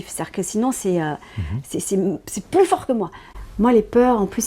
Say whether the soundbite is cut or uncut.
cut